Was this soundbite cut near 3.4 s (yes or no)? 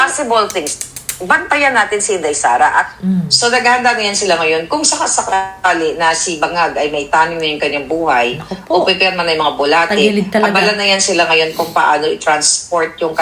yes